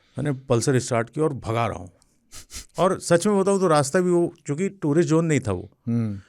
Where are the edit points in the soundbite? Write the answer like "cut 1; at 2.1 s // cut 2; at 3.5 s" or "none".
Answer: none

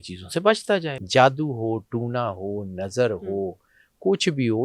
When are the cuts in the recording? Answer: cut 1; at 0.9 s

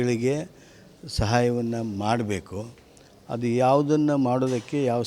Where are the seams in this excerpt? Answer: cut 1; at 3.1 s

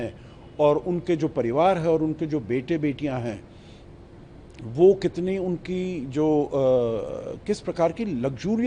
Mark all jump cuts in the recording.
none

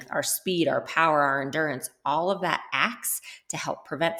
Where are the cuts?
none

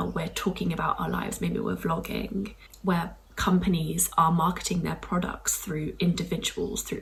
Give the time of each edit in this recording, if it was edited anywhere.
none

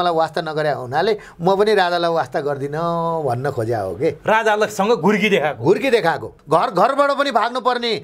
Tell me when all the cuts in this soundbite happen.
cut 1; at 6.4 s

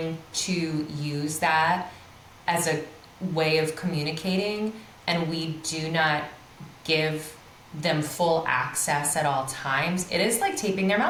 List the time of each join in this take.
none

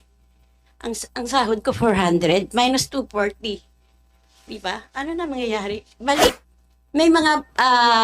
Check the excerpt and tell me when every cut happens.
cut 1; at 6.2 s

